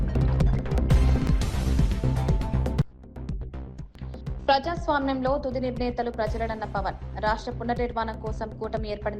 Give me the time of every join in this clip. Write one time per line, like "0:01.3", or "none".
0:04.5